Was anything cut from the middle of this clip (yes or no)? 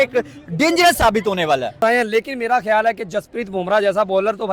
yes